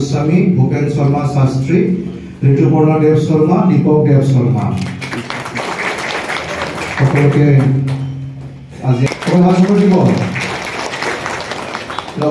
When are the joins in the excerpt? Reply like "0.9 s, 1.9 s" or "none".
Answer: none